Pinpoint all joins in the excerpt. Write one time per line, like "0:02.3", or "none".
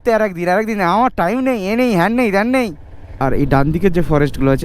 0:03.2